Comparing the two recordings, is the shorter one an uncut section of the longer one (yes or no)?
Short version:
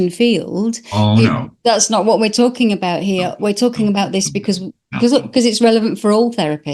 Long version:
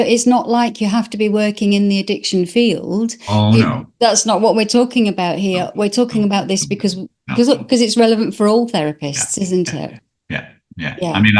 yes